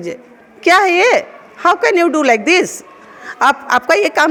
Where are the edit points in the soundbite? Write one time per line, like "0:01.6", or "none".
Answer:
none